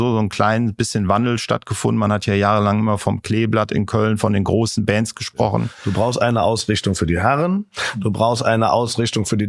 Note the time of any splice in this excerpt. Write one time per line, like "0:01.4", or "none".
0:05.8